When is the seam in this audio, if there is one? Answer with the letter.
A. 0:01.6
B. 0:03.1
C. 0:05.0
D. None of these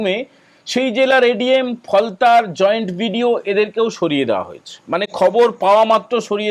D